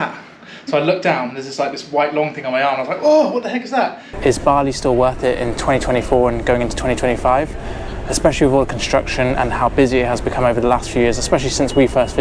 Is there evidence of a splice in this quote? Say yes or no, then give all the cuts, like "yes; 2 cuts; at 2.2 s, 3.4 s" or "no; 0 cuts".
yes; 1 cut; at 4.0 s